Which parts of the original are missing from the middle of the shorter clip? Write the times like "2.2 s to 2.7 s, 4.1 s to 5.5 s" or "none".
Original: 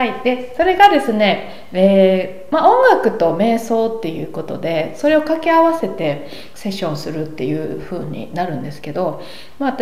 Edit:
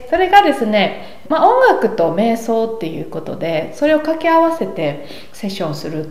1.6 s to 2.3 s